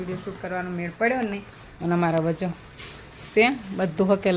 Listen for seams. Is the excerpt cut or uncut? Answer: uncut